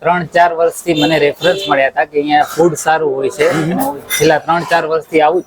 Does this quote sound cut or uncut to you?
uncut